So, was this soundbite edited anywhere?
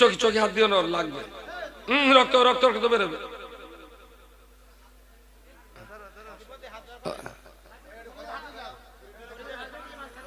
no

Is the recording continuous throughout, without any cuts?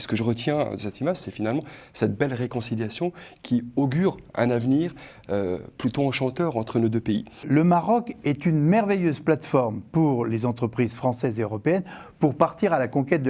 no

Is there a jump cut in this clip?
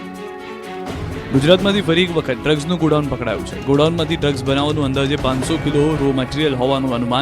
yes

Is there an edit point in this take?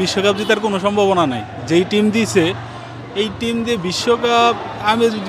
no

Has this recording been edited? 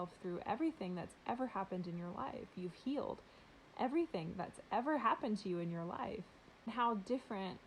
yes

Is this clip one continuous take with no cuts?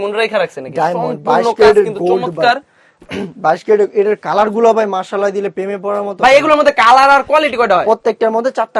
yes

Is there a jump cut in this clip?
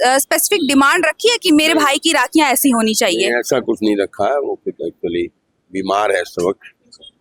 no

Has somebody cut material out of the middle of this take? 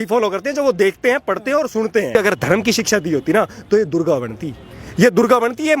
yes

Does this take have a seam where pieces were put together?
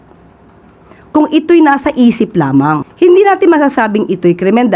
yes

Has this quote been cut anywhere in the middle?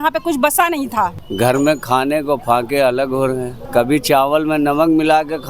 yes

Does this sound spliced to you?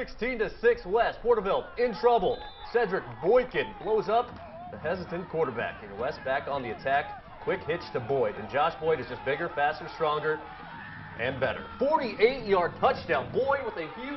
no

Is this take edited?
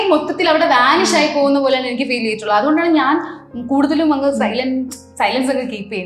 no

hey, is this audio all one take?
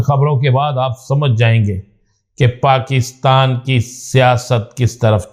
yes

